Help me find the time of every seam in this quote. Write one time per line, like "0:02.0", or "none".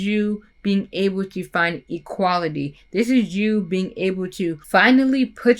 0:04.6